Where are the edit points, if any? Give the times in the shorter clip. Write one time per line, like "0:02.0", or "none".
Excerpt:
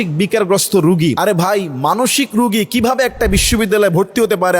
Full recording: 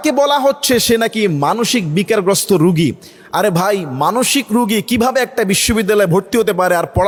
0:01.2